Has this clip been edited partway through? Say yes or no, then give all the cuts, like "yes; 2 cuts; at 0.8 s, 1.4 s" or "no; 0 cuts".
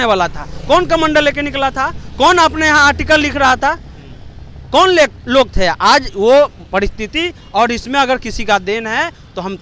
no; 0 cuts